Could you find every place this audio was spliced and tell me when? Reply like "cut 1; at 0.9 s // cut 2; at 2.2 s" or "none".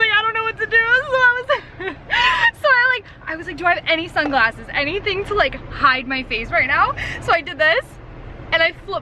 none